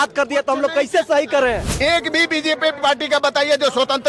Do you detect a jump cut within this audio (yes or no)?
yes